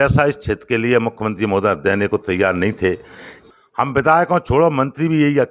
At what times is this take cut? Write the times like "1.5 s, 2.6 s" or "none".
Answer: 3.5 s